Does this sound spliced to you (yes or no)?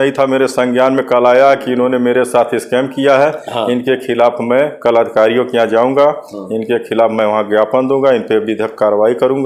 no